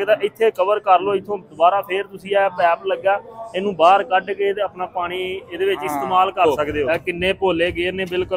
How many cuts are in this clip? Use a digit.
1